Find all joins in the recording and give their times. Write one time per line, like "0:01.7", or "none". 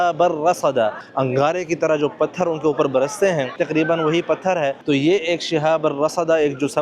0:01.0
0:03.6
0:04.8

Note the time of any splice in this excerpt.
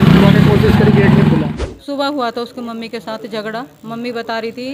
0:01.5

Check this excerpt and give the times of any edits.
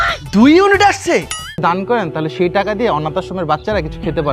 0:01.5

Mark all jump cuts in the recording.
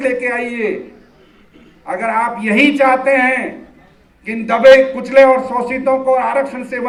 none

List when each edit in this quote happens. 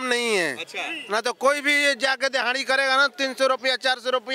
none

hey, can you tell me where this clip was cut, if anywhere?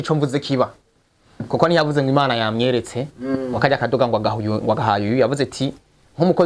none

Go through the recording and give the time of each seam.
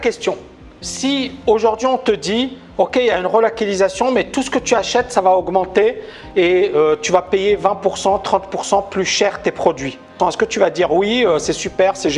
0:10.1

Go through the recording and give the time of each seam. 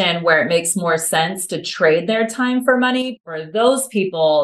0:03.2

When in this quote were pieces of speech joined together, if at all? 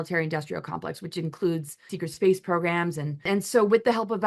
0:01.9
0:03.3

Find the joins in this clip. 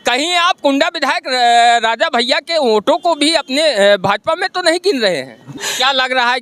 0:05.4

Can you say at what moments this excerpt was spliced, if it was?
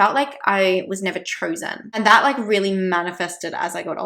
0:01.8

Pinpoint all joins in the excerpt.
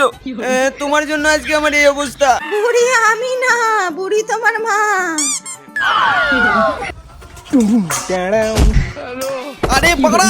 0:02.4

